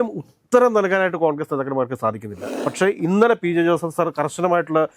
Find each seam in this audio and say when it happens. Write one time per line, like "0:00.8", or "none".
0:02.5